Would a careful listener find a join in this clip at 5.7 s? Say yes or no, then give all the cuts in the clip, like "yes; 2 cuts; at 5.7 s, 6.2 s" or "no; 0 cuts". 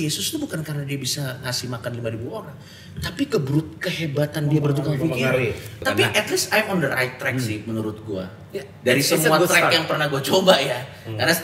yes; 1 cut; at 5.7 s